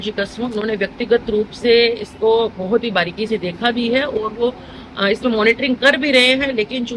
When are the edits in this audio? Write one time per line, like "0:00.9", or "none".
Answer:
none